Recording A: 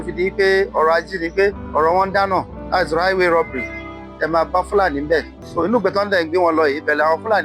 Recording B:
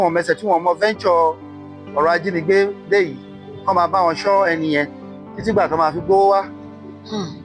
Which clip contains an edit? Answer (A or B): A